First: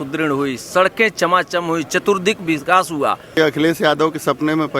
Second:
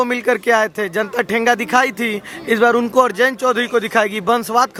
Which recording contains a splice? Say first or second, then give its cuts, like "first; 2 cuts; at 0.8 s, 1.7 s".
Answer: first; 1 cut; at 3.4 s